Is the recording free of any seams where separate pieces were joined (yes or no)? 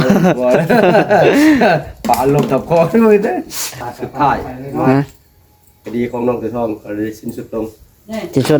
no